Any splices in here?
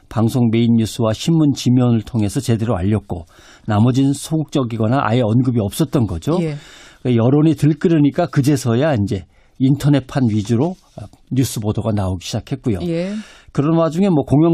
no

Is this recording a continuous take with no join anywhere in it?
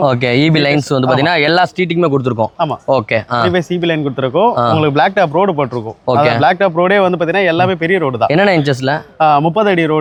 yes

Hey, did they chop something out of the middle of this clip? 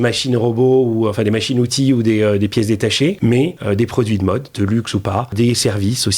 yes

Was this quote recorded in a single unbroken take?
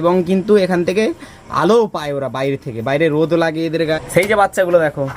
no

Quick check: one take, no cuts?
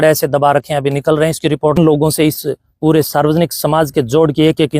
no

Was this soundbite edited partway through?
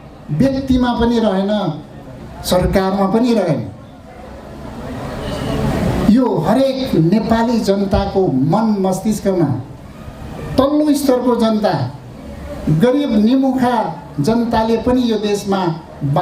no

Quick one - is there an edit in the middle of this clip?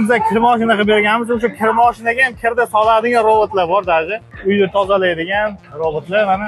no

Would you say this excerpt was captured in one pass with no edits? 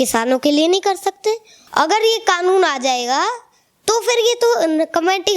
no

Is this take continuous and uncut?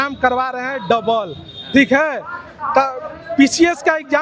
yes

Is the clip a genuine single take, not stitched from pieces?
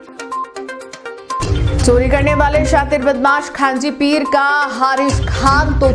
no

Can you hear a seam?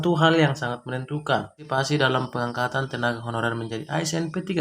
yes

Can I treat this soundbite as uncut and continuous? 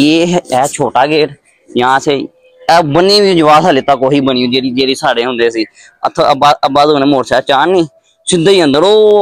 yes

